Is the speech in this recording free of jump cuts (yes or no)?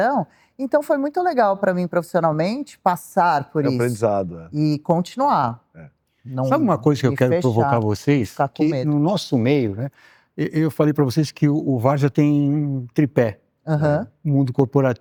yes